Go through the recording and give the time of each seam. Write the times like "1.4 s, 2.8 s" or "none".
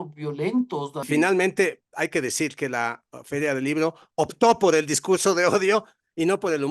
1.0 s